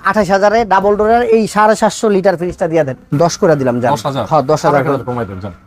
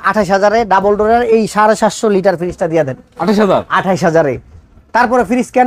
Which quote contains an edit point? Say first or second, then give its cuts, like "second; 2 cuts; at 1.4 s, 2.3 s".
first; 1 cut; at 3.0 s